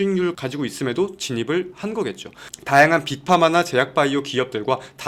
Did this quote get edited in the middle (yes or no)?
no